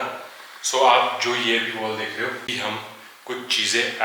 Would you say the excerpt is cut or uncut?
cut